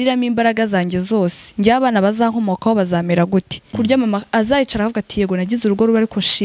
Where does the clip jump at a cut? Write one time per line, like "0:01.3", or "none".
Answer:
0:03.6